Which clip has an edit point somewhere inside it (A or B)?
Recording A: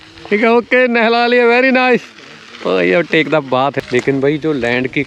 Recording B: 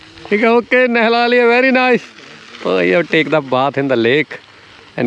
A